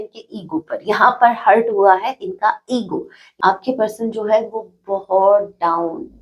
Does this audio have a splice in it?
yes; 1 cut; at 3.2 s

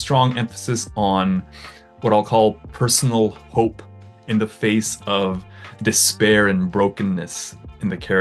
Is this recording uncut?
yes; 0 cuts

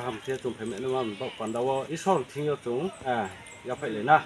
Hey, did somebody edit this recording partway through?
yes; 2 cuts; at 1.9 s, 3.0 s

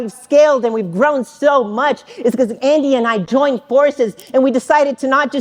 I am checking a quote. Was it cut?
no; 0 cuts

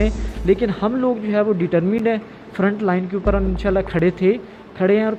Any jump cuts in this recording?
no; 0 cuts

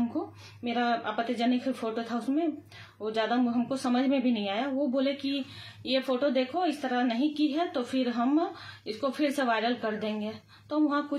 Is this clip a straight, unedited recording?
yes; 0 cuts

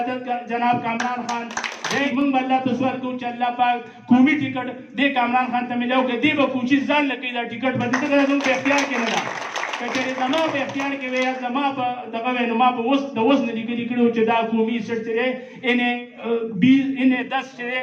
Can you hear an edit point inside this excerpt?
yes; 1 cut; at 2.0 s

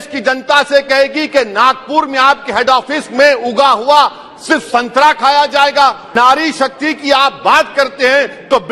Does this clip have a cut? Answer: yes; 1 cut; at 6.0 s

